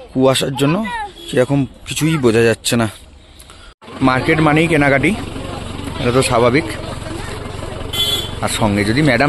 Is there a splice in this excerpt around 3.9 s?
yes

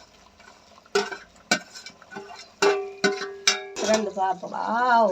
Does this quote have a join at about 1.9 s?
no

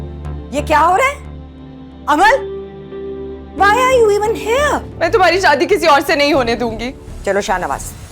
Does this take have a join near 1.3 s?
no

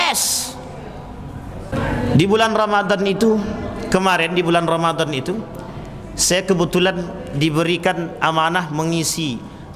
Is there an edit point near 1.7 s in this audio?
yes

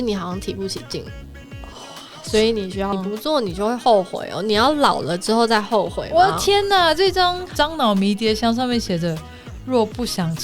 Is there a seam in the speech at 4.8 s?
no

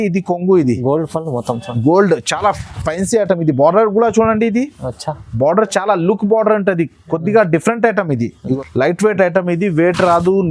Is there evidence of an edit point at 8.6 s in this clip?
yes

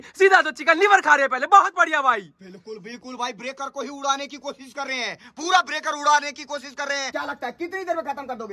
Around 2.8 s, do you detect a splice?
no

